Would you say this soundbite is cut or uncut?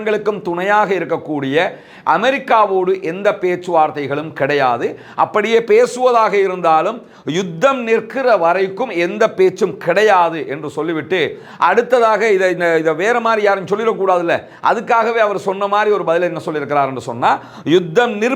uncut